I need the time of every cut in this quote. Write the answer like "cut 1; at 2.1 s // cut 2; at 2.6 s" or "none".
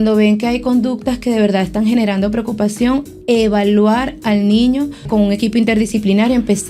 cut 1; at 5.1 s